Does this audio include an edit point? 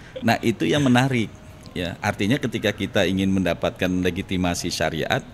no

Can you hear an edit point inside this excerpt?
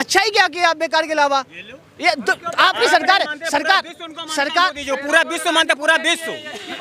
no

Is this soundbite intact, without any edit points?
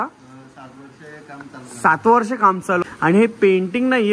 no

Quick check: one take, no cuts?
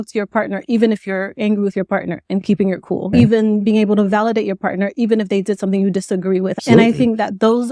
no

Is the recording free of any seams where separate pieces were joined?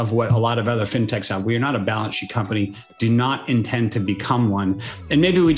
yes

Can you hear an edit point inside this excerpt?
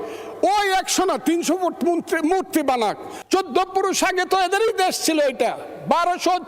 yes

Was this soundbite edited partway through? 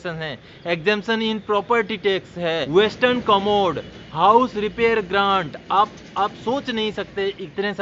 yes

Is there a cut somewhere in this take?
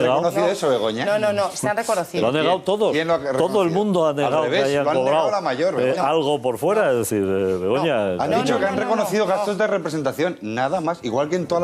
no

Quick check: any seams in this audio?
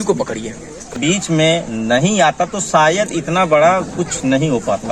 yes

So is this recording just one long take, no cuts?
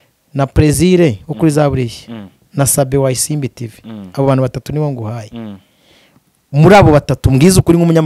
yes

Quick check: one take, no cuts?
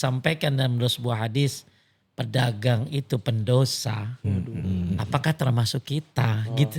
yes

